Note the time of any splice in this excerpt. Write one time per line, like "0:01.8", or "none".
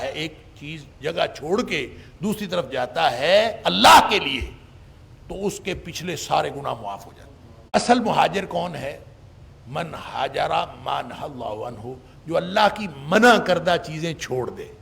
0:07.8